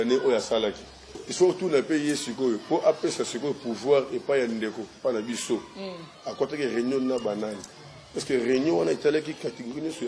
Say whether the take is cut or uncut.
cut